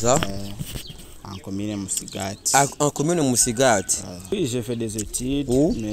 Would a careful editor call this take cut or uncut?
cut